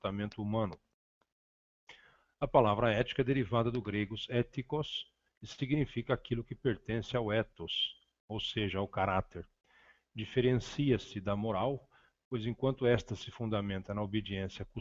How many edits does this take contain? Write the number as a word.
zero